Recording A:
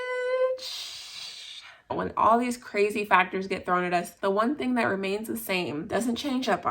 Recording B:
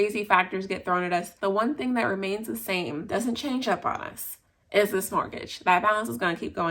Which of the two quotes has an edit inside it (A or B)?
A